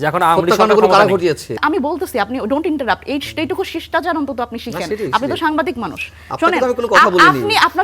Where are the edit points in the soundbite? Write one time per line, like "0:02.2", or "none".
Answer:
0:01.6